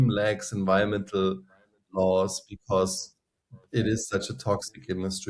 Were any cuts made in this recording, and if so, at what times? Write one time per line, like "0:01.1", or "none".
none